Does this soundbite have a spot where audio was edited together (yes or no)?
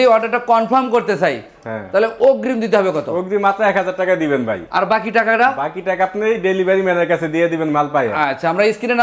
no